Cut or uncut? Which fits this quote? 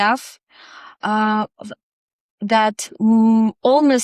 uncut